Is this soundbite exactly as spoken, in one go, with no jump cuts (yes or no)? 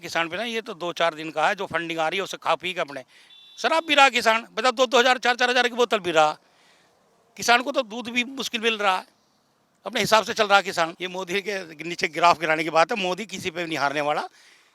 no